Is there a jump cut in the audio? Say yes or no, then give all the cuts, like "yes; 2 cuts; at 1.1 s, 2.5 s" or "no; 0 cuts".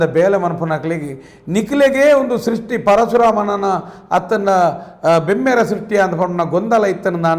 no; 0 cuts